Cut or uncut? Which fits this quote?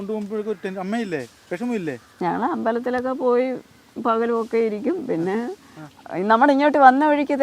uncut